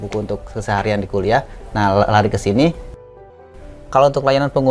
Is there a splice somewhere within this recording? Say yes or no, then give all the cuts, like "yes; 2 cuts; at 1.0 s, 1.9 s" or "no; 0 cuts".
yes; 1 cut; at 3.2 s